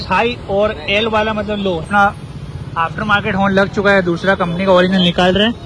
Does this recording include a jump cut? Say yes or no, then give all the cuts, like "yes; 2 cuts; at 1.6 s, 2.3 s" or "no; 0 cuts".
yes; 1 cut; at 1.8 s